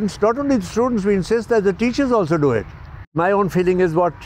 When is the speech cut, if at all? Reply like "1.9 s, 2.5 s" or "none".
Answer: 3.1 s